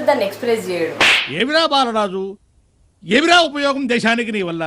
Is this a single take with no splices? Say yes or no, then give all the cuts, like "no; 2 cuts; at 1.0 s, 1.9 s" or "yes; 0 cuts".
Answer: no; 1 cut; at 0.9 s